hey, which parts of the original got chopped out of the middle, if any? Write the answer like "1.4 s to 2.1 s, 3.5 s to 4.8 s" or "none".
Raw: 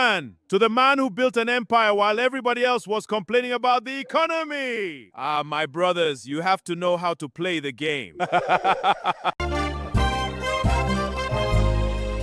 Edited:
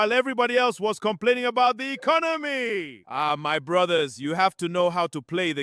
none